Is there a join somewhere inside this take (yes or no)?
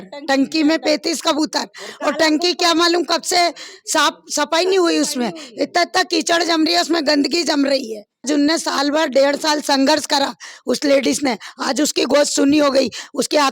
yes